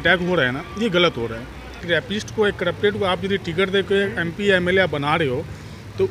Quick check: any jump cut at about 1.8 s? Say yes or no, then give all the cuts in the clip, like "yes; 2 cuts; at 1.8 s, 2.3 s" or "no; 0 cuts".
yes; 1 cut; at 1.8 s